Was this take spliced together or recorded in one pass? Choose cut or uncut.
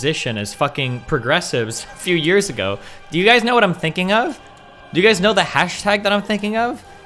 uncut